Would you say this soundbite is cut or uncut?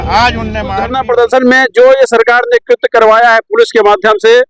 cut